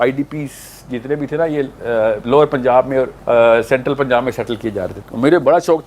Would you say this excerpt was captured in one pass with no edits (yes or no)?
no